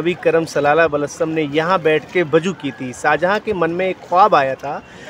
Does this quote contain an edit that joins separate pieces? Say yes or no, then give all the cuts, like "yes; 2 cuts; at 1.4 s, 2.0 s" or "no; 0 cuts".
no; 0 cuts